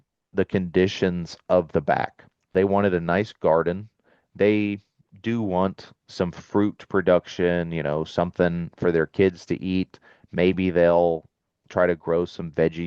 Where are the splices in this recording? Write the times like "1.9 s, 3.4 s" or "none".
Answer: 2.5 s